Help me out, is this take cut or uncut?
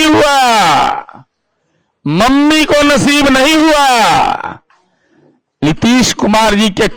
uncut